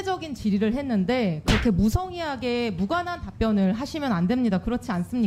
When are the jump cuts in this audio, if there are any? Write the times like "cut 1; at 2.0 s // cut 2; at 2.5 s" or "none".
none